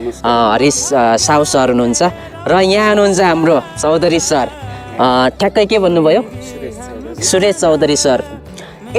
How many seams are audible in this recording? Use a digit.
0